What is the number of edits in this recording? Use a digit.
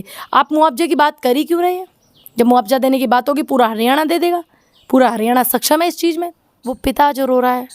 1